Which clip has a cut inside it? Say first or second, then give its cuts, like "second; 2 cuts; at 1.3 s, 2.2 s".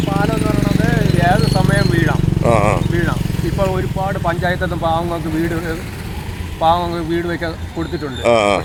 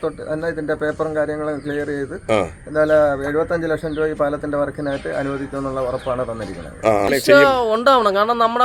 second; 1 cut; at 7.1 s